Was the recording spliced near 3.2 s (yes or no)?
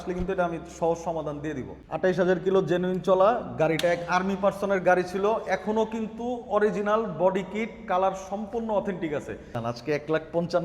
no